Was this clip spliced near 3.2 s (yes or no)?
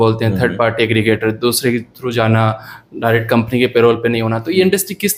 no